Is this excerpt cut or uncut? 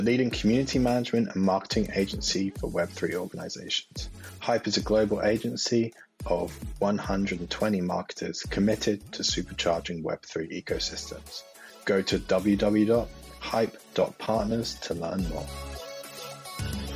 cut